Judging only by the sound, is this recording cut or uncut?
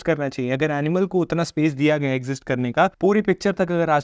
cut